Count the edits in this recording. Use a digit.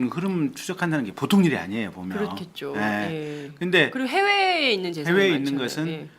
1